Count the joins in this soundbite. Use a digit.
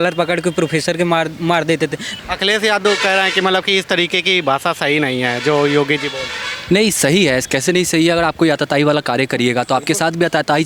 1